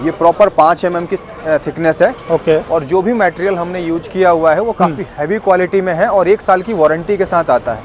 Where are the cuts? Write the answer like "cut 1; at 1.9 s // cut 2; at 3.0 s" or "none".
none